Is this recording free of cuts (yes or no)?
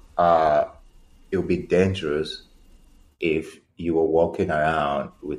yes